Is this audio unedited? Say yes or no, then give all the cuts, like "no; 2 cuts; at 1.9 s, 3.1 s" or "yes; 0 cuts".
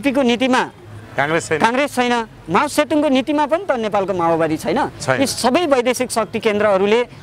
yes; 0 cuts